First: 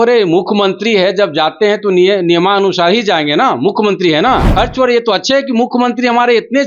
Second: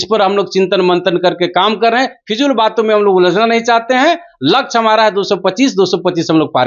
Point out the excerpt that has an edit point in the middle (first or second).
first